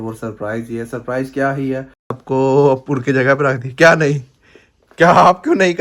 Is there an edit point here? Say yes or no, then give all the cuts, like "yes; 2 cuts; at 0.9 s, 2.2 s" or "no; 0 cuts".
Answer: yes; 1 cut; at 2.2 s